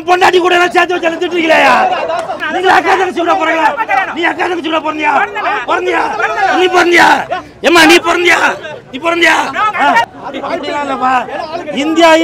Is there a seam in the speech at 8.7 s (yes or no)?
no